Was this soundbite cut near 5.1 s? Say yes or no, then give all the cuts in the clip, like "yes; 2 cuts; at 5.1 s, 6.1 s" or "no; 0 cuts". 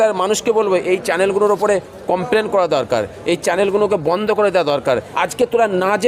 yes; 1 cut; at 5.1 s